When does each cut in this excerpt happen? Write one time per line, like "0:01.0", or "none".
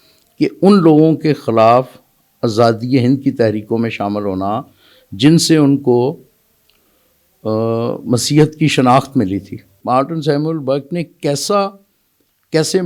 0:09.8